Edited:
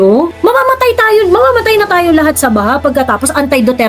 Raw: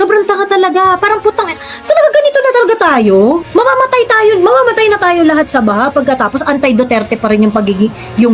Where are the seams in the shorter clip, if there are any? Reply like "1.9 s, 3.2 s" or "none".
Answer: none